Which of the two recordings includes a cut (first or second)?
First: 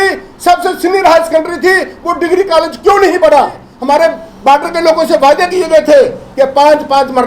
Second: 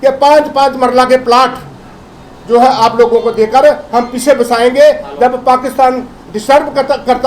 first